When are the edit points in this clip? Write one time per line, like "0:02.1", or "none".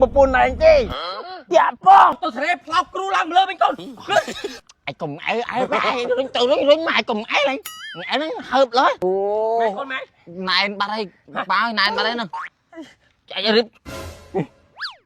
0:02.2
0:04.5
0:09.0